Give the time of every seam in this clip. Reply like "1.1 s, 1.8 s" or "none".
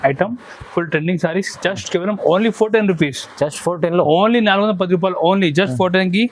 none